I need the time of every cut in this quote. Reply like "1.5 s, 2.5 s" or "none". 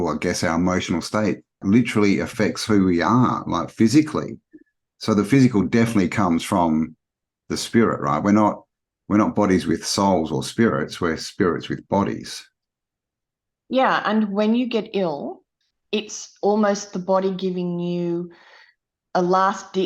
1.6 s

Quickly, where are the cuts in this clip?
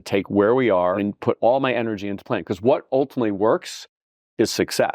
1.0 s, 2.9 s

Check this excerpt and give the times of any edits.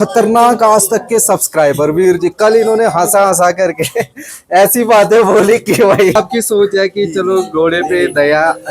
6.1 s

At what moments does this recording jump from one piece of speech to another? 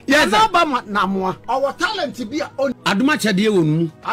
1.4 s, 2.8 s

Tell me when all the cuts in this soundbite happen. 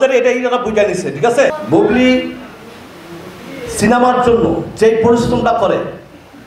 1.5 s

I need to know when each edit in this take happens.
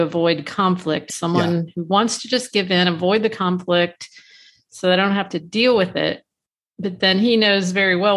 1.0 s

